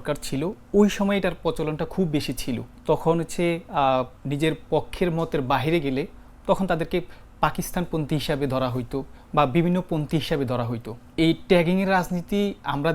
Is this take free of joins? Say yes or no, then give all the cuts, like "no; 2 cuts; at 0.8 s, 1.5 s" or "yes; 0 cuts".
no; 4 cuts; at 2.7 s, 4.2 s, 9.2 s, 11.0 s